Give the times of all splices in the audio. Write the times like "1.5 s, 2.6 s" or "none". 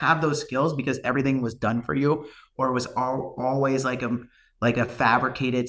none